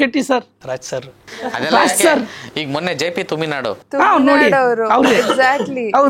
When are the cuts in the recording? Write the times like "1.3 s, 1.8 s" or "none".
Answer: none